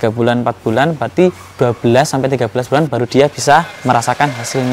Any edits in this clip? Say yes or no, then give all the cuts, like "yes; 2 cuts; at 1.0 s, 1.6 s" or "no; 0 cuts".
yes; 1 cut; at 3.7 s